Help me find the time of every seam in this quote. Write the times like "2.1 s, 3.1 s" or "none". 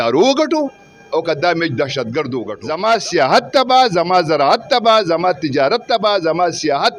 2.5 s